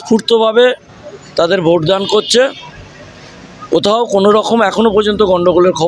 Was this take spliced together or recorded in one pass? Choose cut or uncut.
uncut